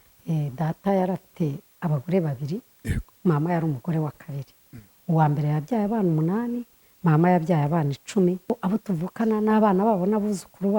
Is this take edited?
yes; 1 cut; at 8.5 s

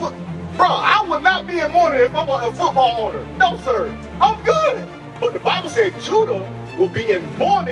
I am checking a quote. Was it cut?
yes; 1 cut; at 5.2 s

